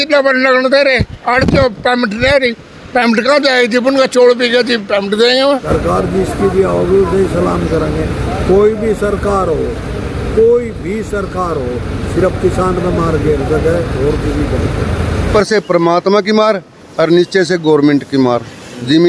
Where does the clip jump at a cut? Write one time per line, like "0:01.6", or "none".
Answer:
0:05.6
0:15.3